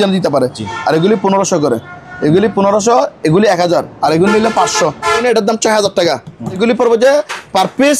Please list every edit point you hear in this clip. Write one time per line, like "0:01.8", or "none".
0:05.2
0:06.6